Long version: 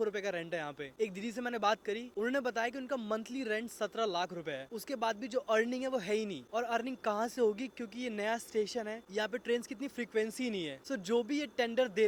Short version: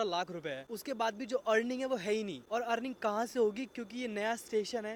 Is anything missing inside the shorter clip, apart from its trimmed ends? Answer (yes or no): no